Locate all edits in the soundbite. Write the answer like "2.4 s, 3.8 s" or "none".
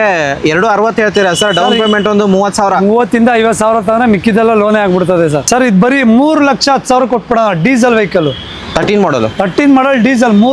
5.4 s